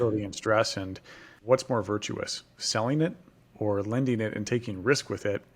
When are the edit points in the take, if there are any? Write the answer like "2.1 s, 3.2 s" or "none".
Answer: 1.4 s